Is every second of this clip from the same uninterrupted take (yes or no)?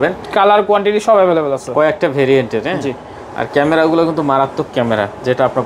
yes